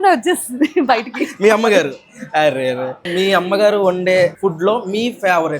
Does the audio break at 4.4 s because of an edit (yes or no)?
yes